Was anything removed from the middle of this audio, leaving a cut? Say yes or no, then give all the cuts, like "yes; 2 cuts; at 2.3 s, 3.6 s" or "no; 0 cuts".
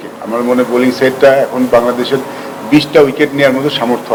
no; 0 cuts